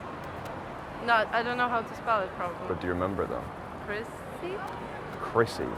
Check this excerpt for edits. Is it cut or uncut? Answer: uncut